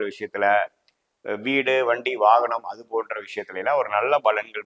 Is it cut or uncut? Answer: uncut